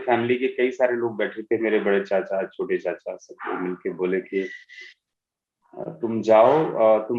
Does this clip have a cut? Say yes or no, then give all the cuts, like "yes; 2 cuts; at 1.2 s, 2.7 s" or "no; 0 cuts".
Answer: no; 0 cuts